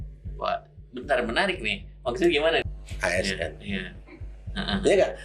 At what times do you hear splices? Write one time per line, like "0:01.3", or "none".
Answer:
0:02.6